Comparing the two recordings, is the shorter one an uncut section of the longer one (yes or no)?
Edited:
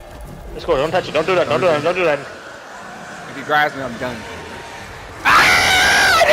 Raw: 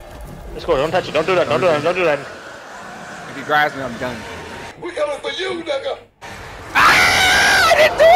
no